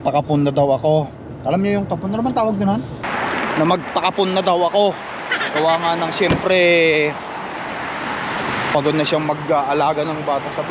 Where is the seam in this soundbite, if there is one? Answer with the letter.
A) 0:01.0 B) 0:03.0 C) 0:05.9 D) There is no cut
B